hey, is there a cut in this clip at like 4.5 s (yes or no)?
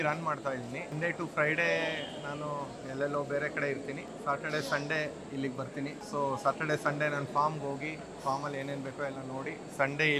no